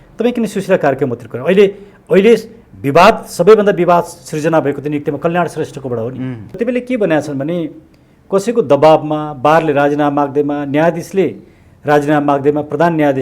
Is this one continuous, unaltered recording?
no; 1 cut; at 6.6 s

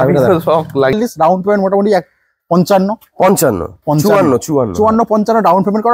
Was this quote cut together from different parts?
yes; 1 cut; at 0.9 s

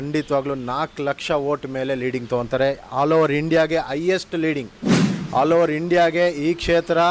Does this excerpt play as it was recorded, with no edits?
yes; 0 cuts

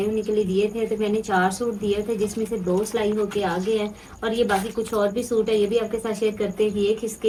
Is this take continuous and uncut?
yes; 0 cuts

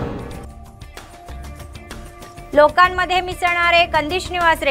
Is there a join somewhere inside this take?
yes; 1 cut; at 2.0 s

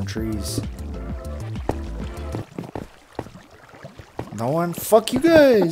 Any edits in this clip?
no; 0 cuts

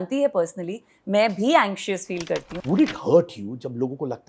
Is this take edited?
yes; 1 cut; at 2.5 s

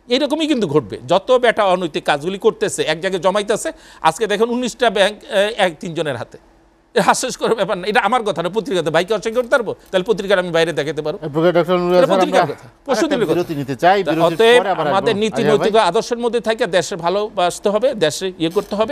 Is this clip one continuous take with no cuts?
yes; 0 cuts

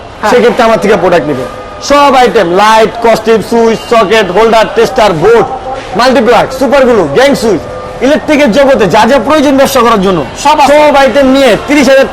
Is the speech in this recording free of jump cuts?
yes; 0 cuts

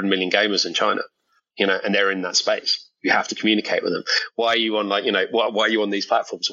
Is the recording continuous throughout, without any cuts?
yes; 0 cuts

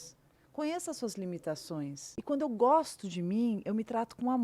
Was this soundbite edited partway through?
yes; 1 cut; at 2.1 s

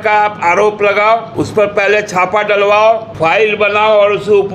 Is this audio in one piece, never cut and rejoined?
no; 2 cuts; at 1.3 s, 3.1 s

